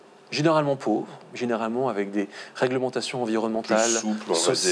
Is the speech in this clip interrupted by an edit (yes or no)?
no